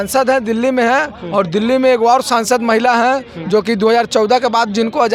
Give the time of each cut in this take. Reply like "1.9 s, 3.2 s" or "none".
none